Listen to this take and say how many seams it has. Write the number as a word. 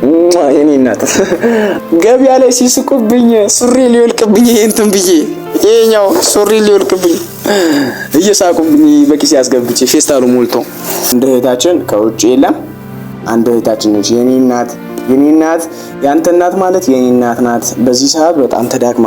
two